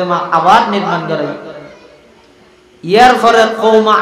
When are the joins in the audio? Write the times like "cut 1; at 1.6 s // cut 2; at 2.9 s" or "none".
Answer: none